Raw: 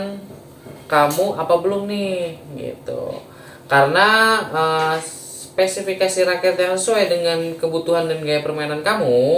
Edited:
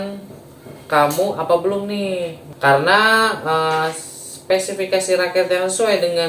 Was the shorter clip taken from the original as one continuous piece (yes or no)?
no